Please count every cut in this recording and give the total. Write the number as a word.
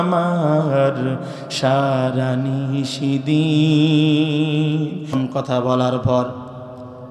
one